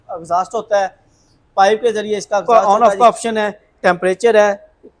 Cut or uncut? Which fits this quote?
cut